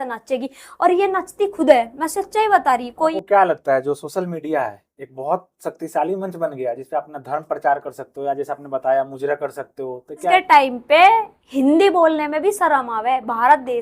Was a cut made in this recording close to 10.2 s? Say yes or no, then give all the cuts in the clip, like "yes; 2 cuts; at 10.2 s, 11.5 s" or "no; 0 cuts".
yes; 2 cuts; at 3.1 s, 10.2 s